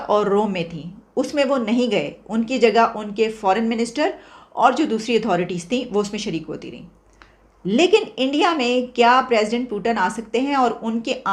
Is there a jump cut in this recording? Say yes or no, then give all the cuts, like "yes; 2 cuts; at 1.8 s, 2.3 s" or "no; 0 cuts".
no; 0 cuts